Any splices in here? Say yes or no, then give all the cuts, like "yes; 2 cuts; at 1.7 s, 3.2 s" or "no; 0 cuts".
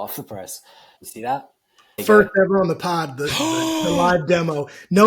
yes; 2 cuts; at 1.0 s, 2.0 s